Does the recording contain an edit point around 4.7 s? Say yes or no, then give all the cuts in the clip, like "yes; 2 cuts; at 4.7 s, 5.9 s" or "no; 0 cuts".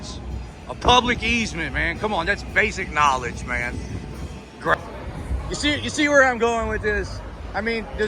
yes; 1 cut; at 4.7 s